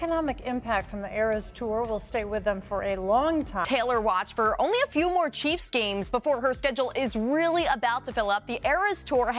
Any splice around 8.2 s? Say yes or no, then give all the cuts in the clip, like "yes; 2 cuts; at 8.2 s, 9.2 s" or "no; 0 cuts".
no; 1 cut; at 3.7 s